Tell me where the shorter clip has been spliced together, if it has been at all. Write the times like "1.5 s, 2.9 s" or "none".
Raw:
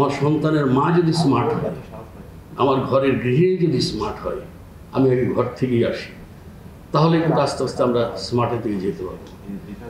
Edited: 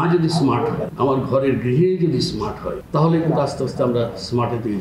0.9 s, 2.7 s